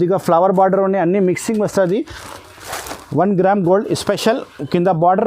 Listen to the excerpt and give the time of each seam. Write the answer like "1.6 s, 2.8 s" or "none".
2.2 s